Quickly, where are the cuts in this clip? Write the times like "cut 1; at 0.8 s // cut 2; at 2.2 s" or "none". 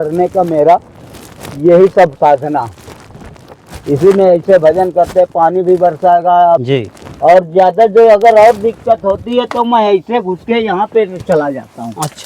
cut 1; at 6.6 s